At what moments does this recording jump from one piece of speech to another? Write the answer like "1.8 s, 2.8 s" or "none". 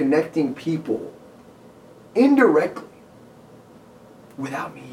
none